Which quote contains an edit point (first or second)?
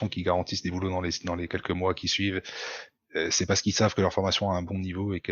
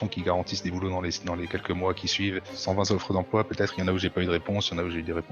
second